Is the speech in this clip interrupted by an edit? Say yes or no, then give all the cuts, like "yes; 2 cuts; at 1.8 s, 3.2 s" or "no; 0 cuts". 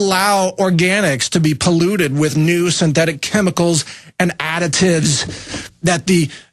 no; 0 cuts